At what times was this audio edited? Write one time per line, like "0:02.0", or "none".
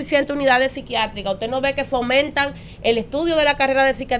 none